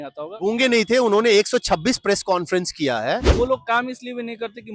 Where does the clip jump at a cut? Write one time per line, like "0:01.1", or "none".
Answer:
0:03.3